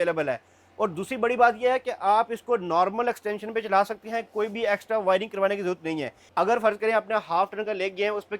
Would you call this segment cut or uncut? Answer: cut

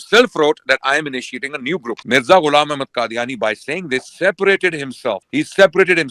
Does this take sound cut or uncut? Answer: cut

